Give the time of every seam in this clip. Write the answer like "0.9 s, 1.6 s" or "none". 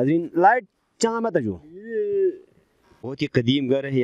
3.1 s